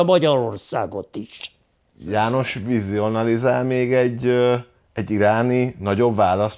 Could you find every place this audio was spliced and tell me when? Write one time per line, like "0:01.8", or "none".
0:02.0